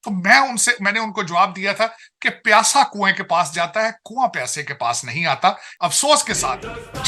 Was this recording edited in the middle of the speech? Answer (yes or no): yes